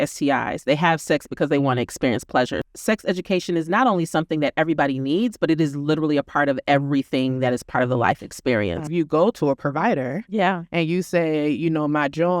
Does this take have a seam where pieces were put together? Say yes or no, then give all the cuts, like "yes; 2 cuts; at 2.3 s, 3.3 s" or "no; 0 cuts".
yes; 2 cuts; at 2.6 s, 8.9 s